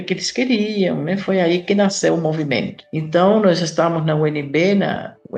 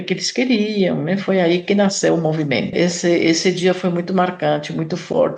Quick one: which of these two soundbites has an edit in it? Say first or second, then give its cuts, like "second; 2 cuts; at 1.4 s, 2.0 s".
second; 1 cut; at 2.7 s